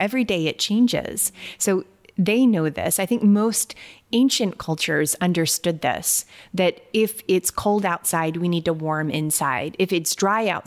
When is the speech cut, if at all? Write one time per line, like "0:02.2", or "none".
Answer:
none